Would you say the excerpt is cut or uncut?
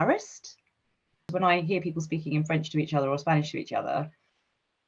cut